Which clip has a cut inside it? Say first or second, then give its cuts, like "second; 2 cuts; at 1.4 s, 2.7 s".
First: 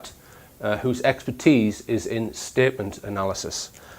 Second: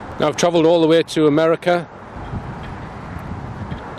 first; 1 cut; at 2.4 s